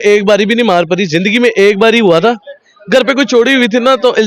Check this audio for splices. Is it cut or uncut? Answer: uncut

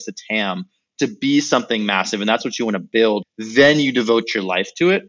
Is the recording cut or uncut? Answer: cut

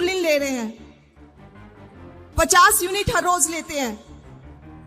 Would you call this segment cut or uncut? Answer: cut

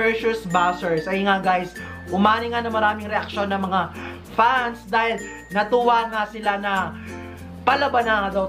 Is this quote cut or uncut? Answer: uncut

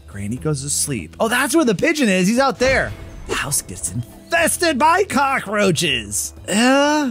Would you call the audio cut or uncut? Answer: uncut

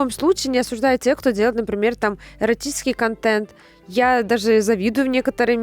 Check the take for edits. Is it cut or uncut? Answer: uncut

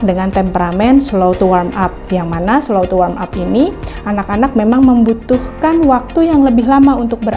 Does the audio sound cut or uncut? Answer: uncut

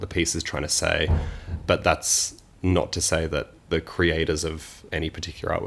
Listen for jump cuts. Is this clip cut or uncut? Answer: cut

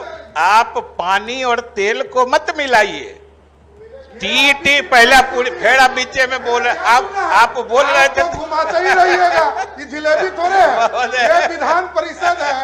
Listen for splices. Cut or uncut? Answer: uncut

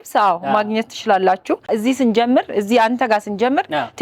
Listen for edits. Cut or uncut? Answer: cut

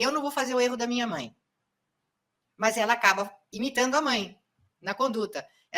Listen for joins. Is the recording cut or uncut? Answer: uncut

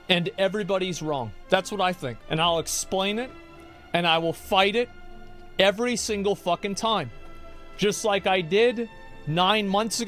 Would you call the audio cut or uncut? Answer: cut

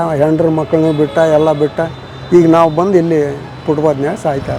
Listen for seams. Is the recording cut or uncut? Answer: uncut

